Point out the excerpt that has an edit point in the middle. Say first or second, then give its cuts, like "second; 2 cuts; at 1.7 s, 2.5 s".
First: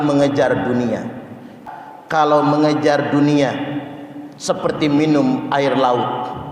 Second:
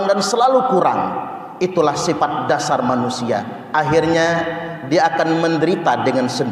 first; 1 cut; at 1.5 s